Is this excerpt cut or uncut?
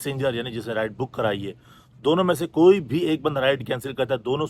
uncut